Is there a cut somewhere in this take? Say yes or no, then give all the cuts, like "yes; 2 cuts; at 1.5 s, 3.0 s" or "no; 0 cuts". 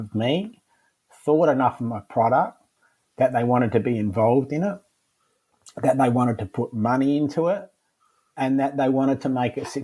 no; 0 cuts